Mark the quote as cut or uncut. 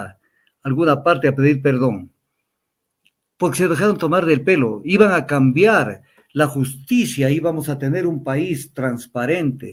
uncut